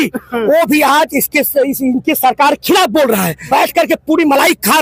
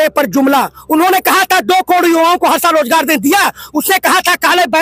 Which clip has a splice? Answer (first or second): first